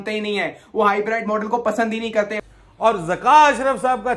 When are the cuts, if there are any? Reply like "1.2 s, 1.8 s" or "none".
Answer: 2.4 s